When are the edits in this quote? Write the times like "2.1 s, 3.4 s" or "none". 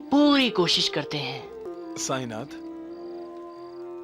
1.7 s